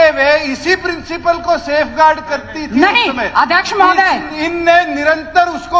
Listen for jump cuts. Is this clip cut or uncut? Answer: uncut